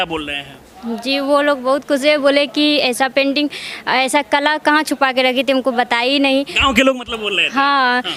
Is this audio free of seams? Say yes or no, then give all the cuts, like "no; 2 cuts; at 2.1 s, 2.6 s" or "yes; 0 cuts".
yes; 0 cuts